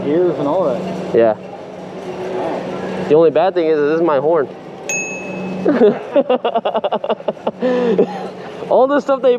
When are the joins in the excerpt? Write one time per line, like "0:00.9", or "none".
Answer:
none